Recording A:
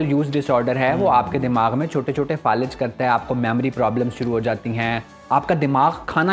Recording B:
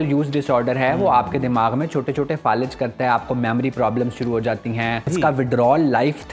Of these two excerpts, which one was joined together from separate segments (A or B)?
B